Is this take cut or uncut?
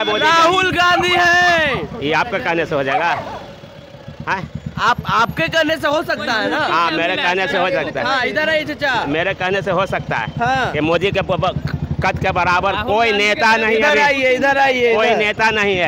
uncut